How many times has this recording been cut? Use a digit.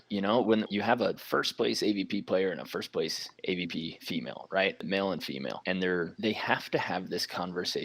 1